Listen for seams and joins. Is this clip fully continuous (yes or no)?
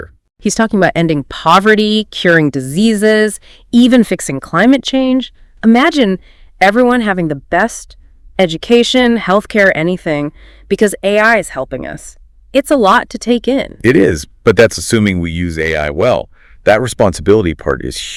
yes